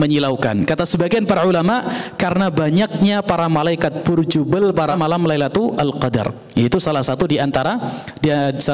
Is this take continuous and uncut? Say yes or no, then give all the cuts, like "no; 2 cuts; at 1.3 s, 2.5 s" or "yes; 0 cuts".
no; 1 cut; at 4.9 s